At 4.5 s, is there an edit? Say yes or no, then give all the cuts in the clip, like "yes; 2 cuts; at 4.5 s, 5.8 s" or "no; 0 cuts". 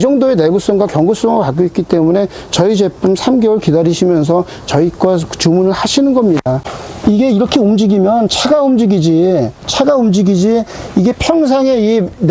no; 2 cuts; at 6.7 s, 9.6 s